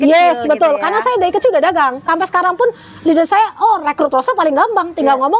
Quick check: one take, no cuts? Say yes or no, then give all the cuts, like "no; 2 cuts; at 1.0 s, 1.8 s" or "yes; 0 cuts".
no; 1 cut; at 2.1 s